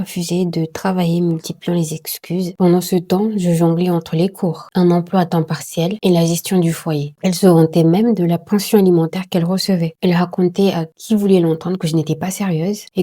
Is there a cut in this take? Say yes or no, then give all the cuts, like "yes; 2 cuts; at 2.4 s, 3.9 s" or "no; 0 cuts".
yes; 3 cuts; at 2.5 s, 7.1 s, 9.9 s